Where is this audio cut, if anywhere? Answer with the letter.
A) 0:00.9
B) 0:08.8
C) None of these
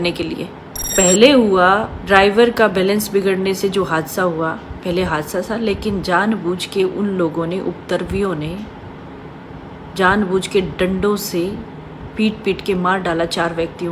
A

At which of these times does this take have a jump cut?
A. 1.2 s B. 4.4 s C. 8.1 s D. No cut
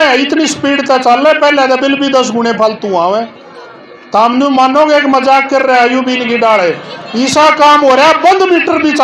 D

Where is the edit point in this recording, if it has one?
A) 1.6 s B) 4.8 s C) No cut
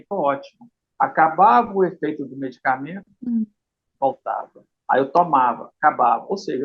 C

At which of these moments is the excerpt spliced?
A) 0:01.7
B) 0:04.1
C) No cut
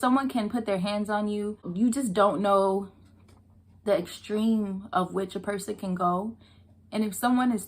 A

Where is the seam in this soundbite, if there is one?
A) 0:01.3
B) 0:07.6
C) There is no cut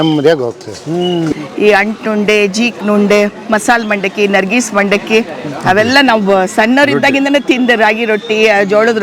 A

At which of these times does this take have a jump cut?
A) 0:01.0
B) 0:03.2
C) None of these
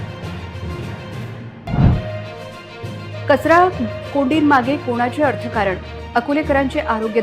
A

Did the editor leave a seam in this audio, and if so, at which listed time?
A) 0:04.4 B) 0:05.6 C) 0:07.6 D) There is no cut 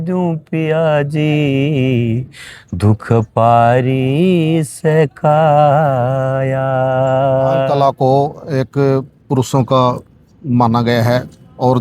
C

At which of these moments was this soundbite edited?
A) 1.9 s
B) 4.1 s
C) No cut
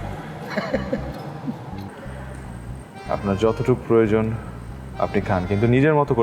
A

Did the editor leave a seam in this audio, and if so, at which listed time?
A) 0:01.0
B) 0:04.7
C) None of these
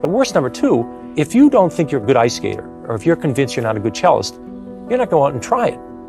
A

